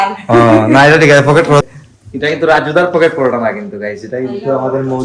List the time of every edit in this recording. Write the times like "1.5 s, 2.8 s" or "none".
1.6 s